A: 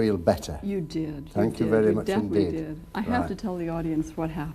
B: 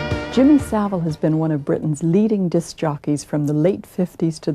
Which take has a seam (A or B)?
A